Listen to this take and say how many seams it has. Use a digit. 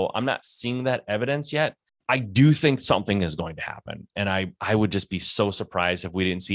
1